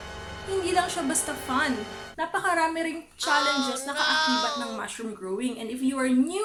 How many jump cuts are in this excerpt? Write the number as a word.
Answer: zero